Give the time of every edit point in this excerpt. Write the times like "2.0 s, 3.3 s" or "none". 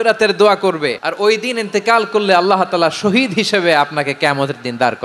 1.0 s